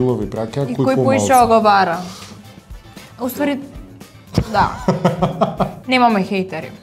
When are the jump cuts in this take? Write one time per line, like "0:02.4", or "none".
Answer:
0:05.8